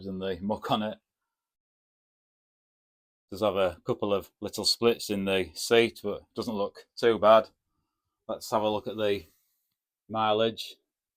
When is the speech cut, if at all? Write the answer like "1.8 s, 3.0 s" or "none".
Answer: none